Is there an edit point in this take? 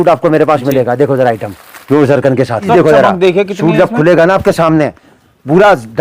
yes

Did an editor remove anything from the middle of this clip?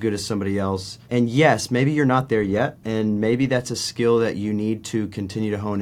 yes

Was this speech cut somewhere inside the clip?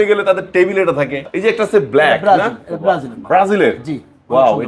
yes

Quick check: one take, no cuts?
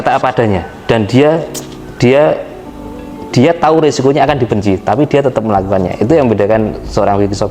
yes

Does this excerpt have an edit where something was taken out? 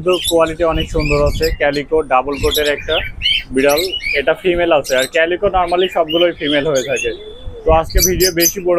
no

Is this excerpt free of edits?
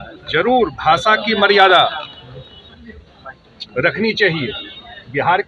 yes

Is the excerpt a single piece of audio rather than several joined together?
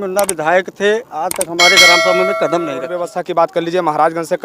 no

